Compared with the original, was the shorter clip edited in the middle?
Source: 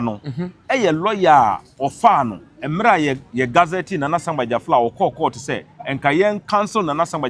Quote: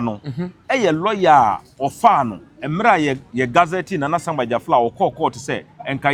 no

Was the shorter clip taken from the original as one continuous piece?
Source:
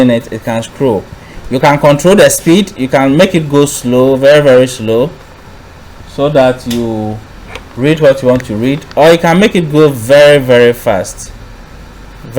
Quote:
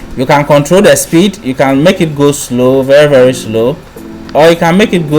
no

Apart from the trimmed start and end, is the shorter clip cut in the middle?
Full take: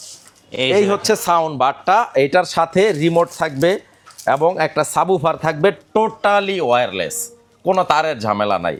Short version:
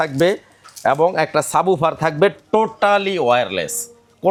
no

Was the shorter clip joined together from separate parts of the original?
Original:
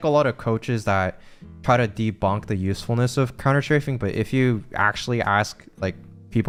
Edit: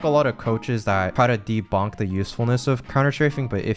yes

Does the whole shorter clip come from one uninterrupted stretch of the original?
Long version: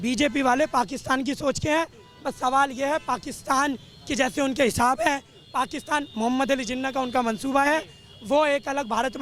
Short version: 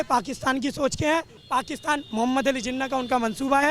no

